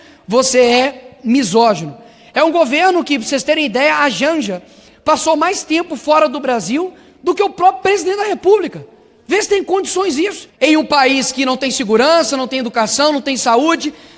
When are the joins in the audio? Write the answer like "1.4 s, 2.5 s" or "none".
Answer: 10.4 s